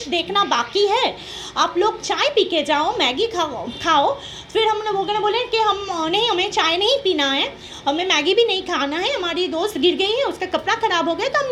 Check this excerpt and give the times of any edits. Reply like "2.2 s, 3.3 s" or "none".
none